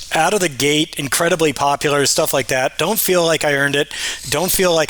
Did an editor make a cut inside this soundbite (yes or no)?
no